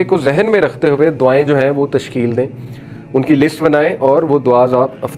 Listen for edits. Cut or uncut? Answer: uncut